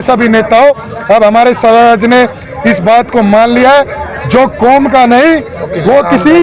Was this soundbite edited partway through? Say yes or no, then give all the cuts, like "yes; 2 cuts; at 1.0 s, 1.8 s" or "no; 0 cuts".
no; 0 cuts